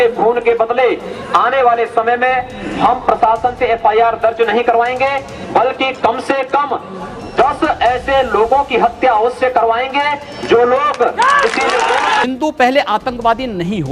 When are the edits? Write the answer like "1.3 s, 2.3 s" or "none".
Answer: 12.2 s